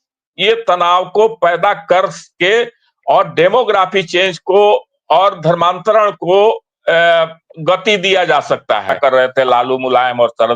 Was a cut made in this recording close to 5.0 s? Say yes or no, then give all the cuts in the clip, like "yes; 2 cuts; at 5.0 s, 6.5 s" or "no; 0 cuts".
no; 1 cut; at 9.0 s